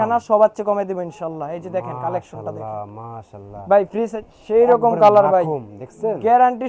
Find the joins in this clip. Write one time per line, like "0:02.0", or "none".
0:04.2